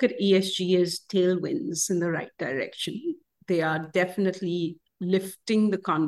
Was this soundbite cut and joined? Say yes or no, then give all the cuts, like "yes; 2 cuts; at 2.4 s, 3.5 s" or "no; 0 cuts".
no; 0 cuts